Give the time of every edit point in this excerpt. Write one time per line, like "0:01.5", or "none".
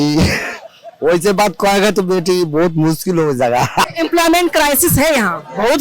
0:03.9